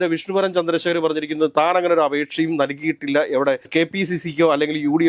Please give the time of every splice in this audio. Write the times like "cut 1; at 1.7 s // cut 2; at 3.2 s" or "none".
cut 1; at 3.7 s